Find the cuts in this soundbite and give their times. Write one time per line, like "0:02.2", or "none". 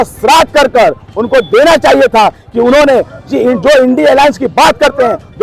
none

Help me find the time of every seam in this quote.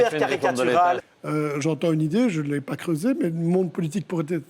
0:01.0

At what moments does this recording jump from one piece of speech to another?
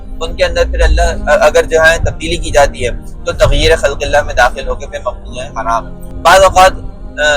0:06.0

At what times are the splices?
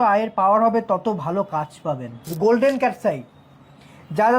0:02.3

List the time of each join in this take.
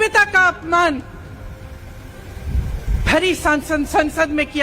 none

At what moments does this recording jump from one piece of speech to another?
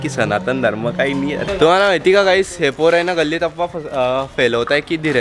0:01.4

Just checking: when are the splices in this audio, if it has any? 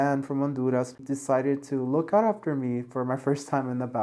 0:00.9

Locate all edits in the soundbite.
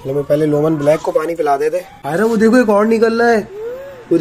0:02.0

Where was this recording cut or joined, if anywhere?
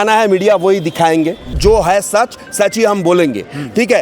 0:01.5

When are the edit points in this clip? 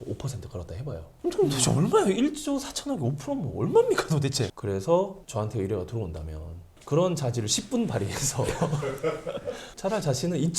0:01.2
0:04.5
0:09.7

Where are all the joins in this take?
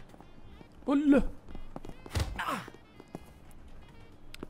0:02.0
0:03.1

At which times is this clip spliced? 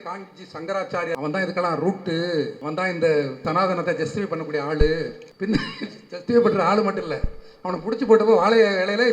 0:01.1
0:02.6
0:03.4
0:05.2

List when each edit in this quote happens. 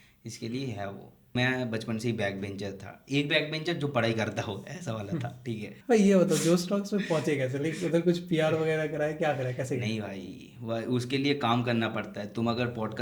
0:01.4
0:05.7

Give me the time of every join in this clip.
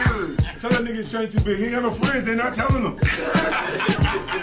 none

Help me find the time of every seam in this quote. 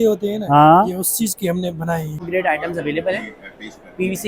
0:02.3

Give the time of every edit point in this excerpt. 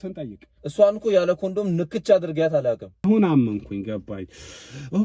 0:03.0

